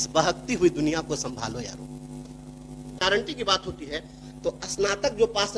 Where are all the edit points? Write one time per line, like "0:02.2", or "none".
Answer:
0:03.0